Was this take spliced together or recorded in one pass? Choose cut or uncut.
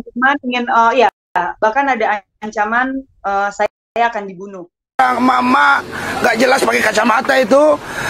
cut